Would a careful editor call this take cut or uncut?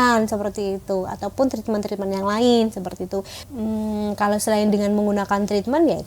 cut